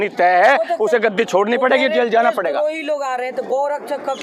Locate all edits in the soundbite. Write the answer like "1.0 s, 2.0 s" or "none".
none